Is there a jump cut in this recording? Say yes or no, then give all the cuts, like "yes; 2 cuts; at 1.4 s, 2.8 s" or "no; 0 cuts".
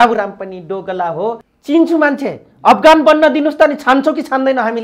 yes; 1 cut; at 1.4 s